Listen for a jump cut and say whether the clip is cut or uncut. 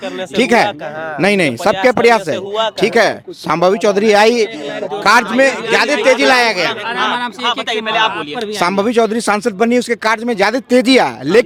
uncut